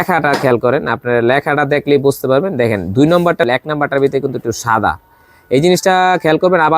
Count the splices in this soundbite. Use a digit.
1